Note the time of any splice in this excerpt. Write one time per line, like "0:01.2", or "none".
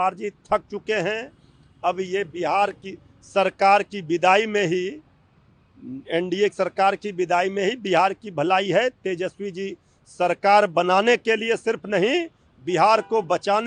none